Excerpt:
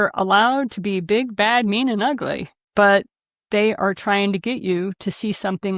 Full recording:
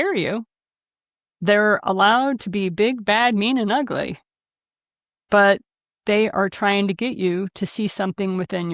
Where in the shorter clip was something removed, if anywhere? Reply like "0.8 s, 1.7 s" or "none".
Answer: 2.5 s